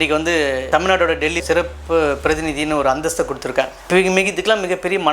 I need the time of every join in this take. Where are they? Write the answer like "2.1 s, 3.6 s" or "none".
1.4 s